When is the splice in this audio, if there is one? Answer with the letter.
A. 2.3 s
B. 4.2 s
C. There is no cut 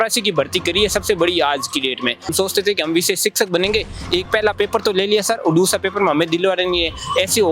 A